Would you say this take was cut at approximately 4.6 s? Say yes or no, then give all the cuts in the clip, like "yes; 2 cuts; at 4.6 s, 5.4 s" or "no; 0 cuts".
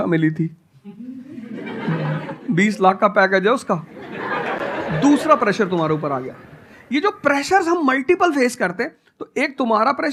no; 0 cuts